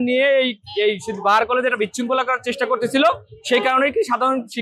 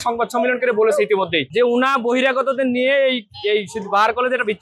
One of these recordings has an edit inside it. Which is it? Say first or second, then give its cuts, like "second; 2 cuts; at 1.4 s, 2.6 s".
second; 1 cut; at 1.4 s